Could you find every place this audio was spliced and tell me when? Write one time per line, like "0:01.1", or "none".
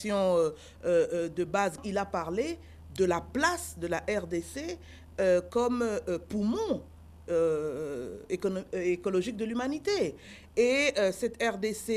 0:01.8